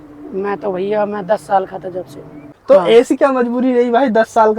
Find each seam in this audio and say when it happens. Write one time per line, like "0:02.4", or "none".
0:02.5